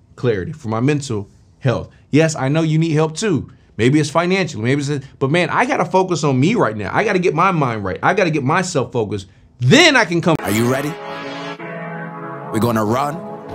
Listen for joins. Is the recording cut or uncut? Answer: cut